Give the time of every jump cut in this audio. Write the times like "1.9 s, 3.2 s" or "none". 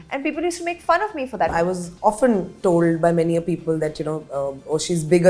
1.5 s